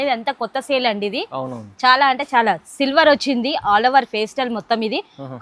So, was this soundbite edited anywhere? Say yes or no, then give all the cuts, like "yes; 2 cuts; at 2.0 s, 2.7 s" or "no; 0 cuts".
no; 0 cuts